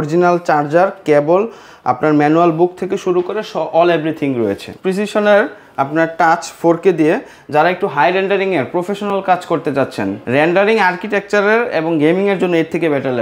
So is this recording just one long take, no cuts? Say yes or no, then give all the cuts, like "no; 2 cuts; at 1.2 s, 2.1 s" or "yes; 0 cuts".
no; 2 cuts; at 4.7 s, 10.2 s